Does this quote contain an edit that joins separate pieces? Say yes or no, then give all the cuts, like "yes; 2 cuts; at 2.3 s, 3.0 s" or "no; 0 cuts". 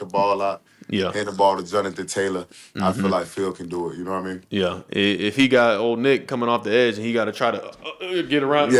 no; 0 cuts